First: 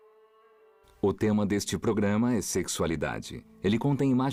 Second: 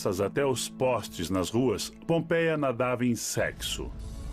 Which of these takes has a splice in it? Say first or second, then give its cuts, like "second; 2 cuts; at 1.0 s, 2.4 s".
second; 1 cut; at 1.9 s